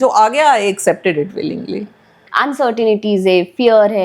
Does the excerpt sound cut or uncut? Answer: cut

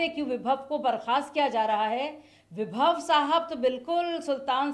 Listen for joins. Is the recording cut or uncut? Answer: uncut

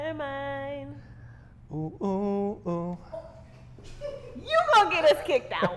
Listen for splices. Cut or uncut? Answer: uncut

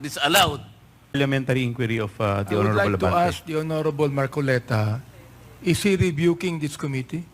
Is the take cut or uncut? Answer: cut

